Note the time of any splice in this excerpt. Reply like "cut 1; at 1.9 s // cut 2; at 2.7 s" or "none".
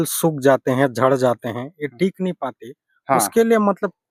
none